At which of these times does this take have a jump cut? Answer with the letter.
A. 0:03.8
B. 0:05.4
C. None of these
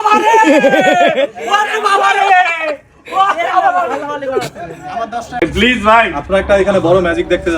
B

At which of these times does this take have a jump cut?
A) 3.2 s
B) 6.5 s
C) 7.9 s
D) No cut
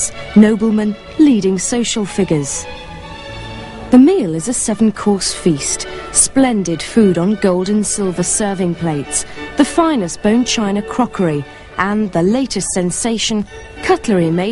C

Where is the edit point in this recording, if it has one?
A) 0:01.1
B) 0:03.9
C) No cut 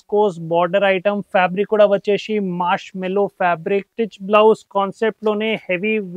B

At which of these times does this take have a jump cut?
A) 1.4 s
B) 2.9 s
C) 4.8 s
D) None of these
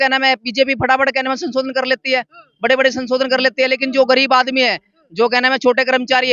D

